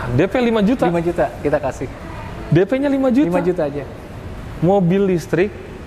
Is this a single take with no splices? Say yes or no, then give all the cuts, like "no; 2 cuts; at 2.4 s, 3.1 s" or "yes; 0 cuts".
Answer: yes; 0 cuts